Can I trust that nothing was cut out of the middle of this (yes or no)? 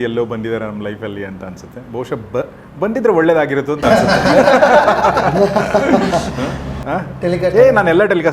no